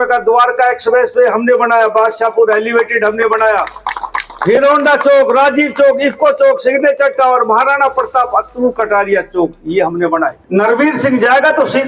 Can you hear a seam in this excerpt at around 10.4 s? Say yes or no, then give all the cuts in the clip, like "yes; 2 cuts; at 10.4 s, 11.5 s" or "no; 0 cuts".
yes; 1 cut; at 10.4 s